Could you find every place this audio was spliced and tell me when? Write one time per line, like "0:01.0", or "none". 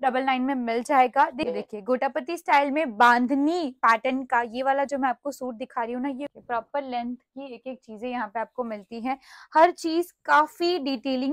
0:01.4
0:06.3